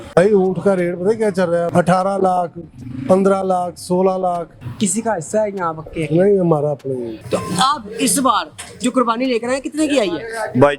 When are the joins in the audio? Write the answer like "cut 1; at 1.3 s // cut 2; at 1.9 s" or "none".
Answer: cut 1; at 1.7 s // cut 2; at 4.6 s // cut 3; at 7.2 s